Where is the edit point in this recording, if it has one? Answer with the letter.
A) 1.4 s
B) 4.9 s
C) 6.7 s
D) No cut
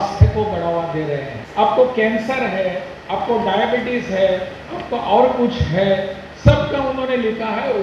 A